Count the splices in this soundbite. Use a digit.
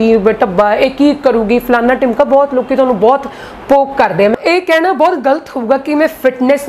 1